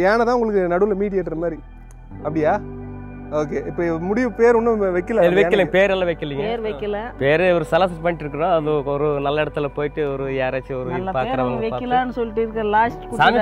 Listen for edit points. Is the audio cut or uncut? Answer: uncut